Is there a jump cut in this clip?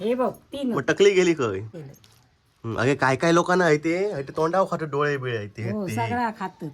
yes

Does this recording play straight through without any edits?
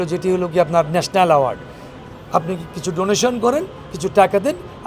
yes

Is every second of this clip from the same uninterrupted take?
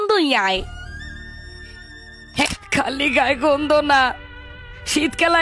no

